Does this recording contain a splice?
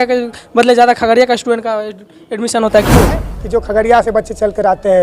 yes; 1 cut; at 3.3 s

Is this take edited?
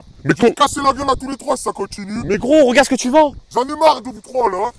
no; 0 cuts

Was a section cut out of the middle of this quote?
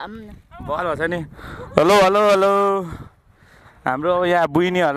no; 0 cuts

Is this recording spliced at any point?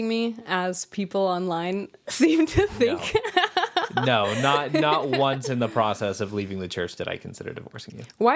no; 0 cuts

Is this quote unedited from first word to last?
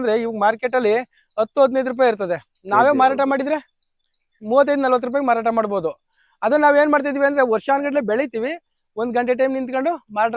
yes; 0 cuts

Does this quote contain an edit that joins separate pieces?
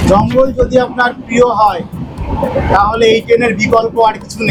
no; 0 cuts

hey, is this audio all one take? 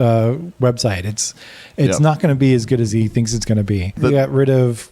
no; 1 cut; at 4.0 s

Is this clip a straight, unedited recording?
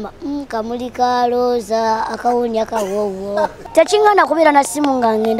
no; 1 cut; at 3.6 s

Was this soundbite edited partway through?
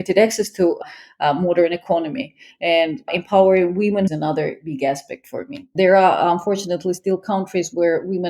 yes; 2 cuts; at 4.1 s, 5.7 s

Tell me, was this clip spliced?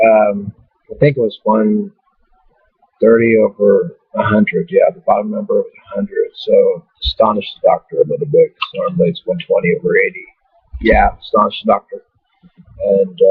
yes; 1 cut; at 9.6 s

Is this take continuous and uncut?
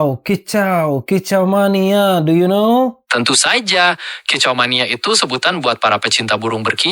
no; 1 cut; at 3.0 s

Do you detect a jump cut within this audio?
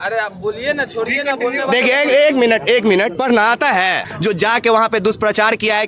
yes; 1 cut; at 4.1 s

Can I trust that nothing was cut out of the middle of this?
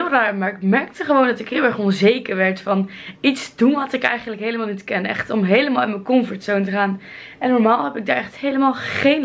yes; 0 cuts

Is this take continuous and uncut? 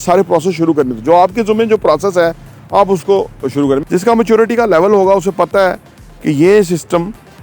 no; 1 cut; at 3.8 s

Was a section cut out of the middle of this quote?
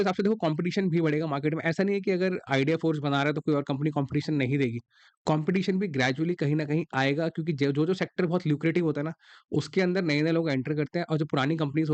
no; 0 cuts

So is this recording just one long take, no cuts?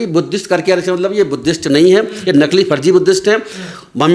yes; 0 cuts

